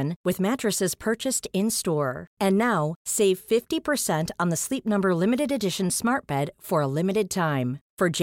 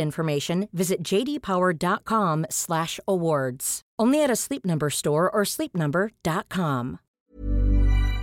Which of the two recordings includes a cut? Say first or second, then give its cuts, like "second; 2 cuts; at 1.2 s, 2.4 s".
second; 1 cut; at 7.0 s